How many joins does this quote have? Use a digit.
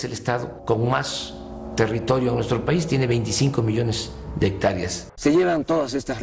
1